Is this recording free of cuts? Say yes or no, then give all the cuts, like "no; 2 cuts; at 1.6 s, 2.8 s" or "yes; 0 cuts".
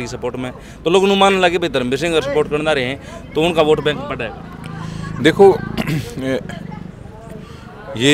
yes; 0 cuts